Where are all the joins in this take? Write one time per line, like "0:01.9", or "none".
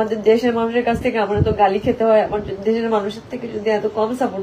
none